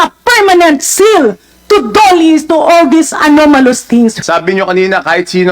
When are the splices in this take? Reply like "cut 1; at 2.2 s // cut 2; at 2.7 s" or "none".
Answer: cut 1; at 4.2 s